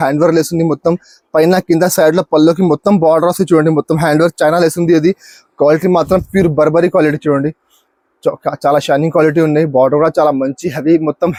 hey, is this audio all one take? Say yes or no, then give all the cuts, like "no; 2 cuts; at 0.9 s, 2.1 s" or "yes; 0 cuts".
yes; 0 cuts